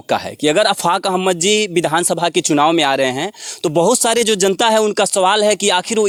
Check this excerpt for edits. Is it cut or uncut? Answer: uncut